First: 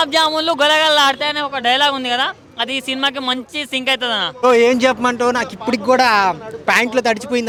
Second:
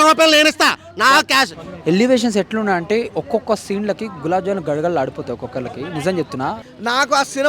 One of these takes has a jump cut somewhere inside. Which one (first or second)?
second